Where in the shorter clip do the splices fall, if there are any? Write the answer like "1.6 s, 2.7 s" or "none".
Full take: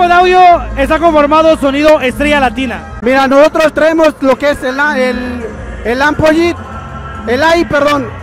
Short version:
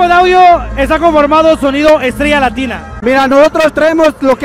none